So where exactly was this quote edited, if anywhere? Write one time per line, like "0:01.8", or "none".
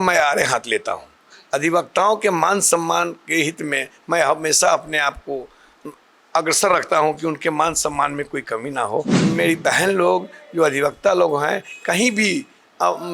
0:09.2